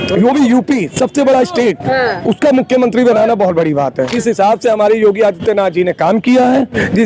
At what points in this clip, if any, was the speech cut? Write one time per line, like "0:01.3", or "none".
0:04.1